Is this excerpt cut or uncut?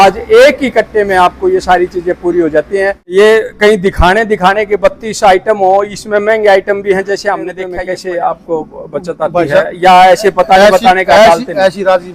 cut